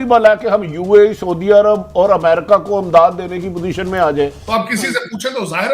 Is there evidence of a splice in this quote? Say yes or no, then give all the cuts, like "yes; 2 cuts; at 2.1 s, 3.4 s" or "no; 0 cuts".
yes; 1 cut; at 4.4 s